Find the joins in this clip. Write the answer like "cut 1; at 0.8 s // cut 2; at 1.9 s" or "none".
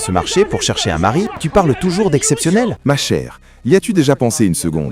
cut 1; at 1.4 s // cut 2; at 2.8 s